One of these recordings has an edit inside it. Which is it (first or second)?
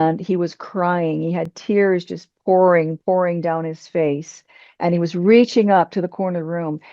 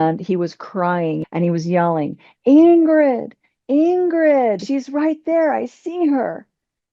second